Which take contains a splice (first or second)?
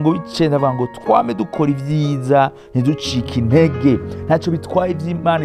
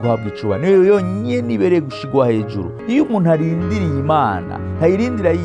second